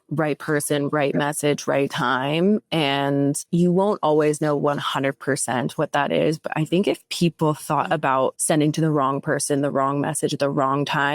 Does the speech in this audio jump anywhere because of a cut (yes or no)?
yes